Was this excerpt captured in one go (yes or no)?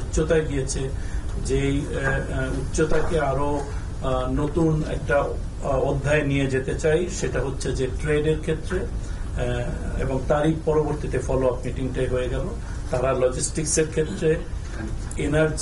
yes